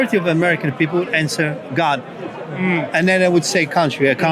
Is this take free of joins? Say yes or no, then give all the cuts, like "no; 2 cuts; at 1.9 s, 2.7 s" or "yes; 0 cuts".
yes; 0 cuts